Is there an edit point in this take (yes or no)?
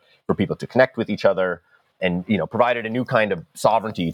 yes